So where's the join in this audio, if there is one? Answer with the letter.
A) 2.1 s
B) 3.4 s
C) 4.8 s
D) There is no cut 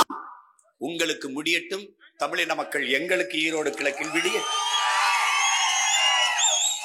D